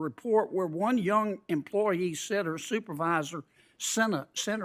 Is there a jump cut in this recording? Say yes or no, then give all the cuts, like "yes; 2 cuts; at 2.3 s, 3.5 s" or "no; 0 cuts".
no; 0 cuts